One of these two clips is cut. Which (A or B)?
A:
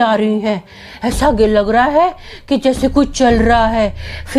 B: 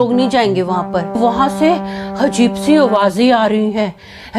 B